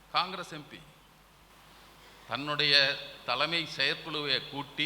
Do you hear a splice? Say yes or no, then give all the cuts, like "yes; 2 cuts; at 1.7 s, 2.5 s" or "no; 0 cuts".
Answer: yes; 1 cut; at 1.5 s